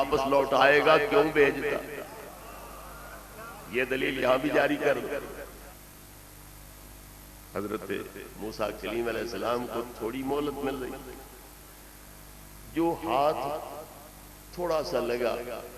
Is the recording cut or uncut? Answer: cut